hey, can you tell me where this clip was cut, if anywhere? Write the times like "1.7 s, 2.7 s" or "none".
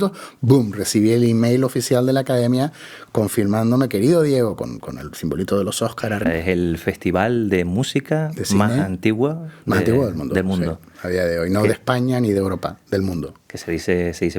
6.2 s